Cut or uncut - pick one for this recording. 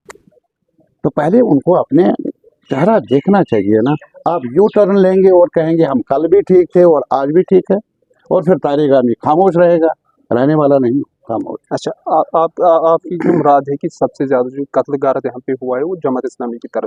uncut